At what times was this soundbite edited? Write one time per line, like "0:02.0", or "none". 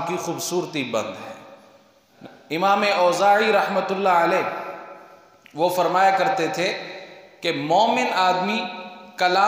0:02.0